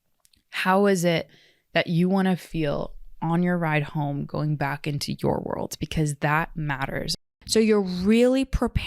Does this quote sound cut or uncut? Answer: cut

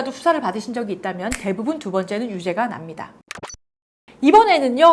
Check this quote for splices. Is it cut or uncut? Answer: uncut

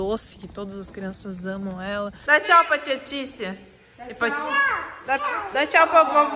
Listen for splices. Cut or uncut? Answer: cut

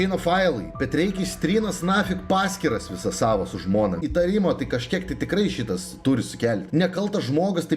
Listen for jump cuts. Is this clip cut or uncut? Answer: cut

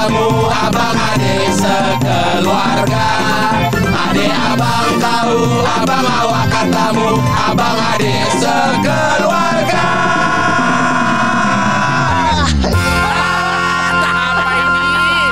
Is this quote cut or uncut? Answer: uncut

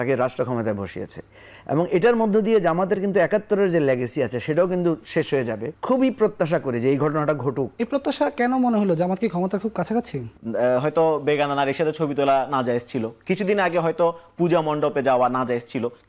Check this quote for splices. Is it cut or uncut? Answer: cut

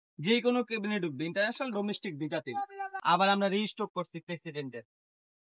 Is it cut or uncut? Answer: cut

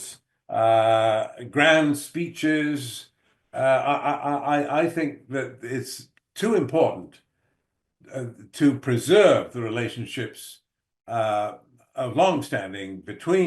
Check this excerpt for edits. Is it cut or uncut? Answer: uncut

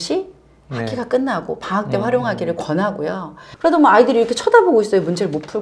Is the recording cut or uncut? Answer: cut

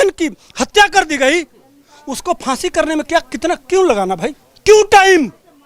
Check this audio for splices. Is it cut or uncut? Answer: cut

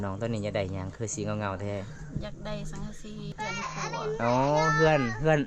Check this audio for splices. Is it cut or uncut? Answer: cut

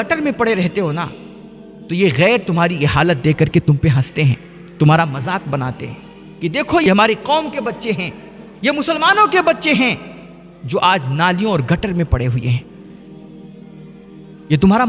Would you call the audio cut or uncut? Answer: uncut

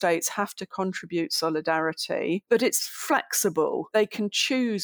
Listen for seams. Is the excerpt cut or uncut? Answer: cut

